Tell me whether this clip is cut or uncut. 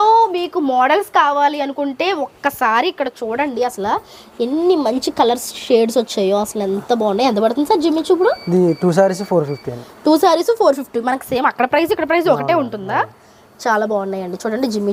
uncut